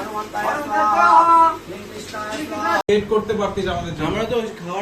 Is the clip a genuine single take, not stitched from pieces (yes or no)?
no